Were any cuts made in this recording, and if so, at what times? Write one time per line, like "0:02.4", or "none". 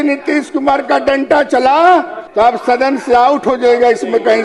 0:02.2